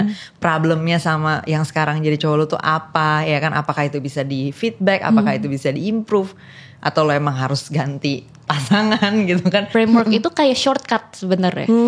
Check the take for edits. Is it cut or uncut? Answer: cut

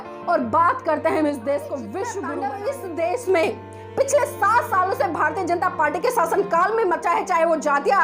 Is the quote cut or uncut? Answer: cut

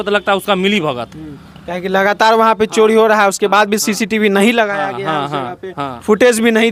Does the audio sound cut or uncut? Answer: uncut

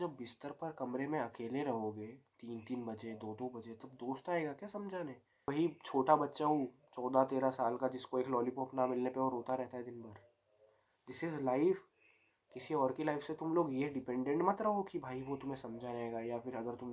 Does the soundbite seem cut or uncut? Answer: cut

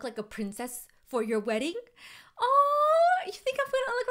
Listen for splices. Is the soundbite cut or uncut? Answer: uncut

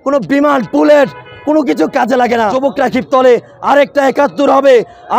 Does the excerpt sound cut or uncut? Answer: cut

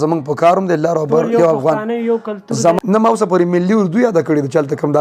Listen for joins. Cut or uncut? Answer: cut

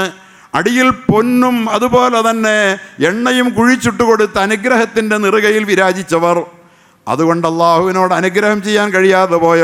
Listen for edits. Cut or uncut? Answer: uncut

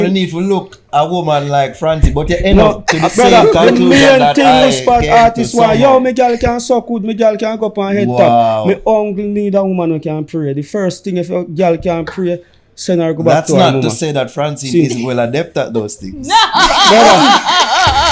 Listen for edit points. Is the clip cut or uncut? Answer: uncut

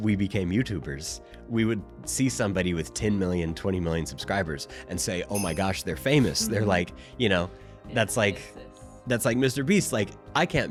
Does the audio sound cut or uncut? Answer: uncut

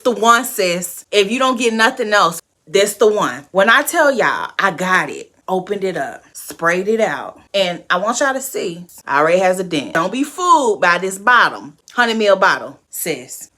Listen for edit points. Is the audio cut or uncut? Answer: cut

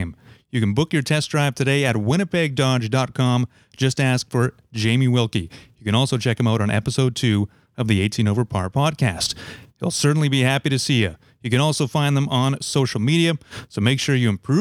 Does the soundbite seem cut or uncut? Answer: uncut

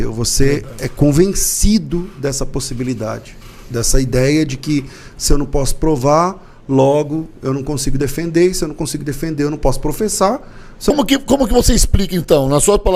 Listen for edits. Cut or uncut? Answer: cut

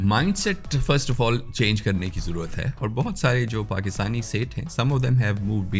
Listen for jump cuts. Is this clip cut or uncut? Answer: uncut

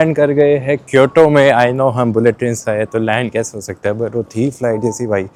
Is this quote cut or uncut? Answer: uncut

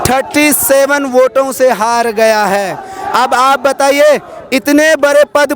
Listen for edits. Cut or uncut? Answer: uncut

